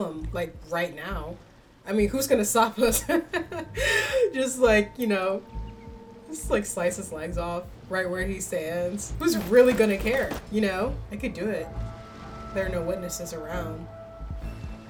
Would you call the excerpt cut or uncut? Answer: uncut